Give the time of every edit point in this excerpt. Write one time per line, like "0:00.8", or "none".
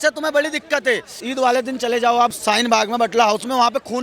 0:01.2
0:02.4